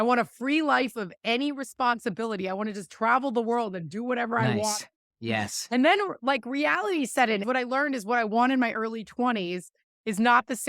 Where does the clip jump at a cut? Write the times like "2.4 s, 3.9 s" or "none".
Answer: 7.4 s